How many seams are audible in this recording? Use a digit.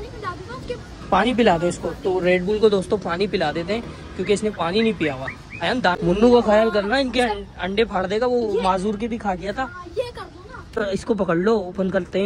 2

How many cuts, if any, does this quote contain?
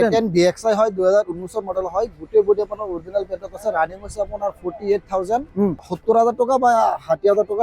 1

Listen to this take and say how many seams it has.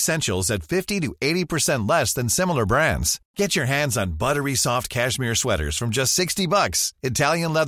0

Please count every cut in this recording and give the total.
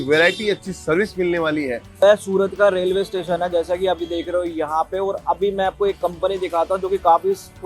1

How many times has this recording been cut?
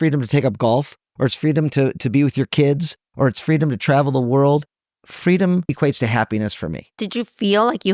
2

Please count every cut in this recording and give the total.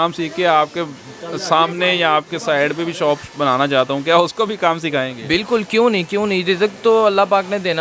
0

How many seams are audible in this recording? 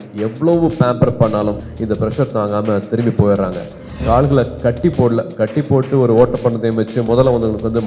2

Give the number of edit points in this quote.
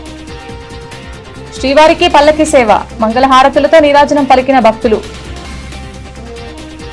1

